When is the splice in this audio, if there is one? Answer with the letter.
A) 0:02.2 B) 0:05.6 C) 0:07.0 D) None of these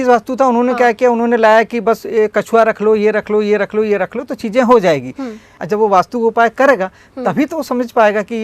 B